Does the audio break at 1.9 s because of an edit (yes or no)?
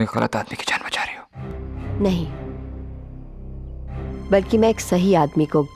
no